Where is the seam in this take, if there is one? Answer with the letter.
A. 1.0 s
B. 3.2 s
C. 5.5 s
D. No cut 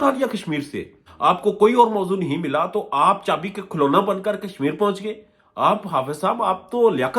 A